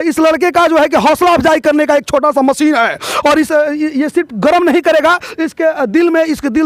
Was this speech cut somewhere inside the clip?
no; 0 cuts

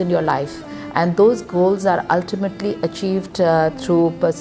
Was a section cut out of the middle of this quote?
no; 0 cuts

